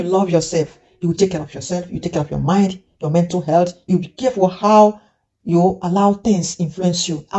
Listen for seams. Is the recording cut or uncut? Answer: cut